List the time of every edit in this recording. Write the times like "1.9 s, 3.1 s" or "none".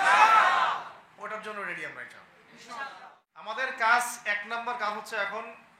3.5 s